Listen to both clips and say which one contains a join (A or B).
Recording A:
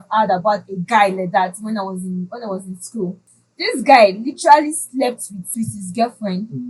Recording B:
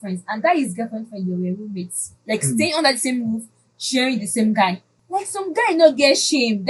B